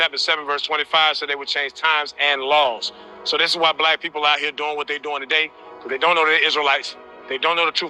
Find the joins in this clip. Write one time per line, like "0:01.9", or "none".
0:02.7